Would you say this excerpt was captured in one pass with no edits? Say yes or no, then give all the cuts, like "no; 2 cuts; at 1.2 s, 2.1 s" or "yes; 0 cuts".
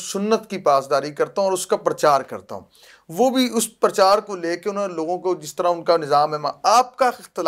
yes; 0 cuts